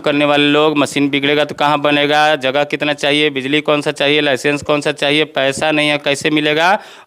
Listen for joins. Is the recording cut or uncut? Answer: uncut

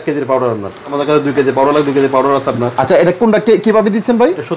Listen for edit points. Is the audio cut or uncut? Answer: cut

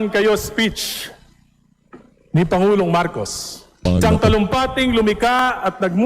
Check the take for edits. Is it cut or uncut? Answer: cut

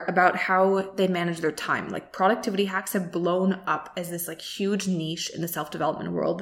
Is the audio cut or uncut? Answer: uncut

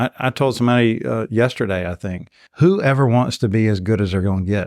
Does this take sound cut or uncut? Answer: uncut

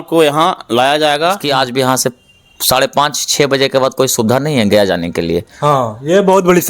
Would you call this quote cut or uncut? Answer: cut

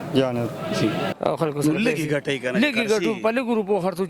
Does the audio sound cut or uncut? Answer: cut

